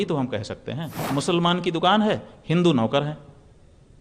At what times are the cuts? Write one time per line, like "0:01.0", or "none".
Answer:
0:01.0